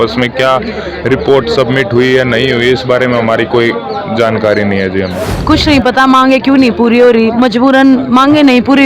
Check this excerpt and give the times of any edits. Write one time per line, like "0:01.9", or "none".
0:05.3